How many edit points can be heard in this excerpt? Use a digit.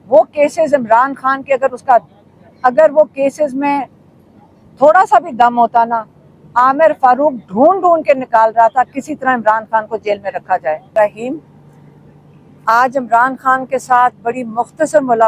1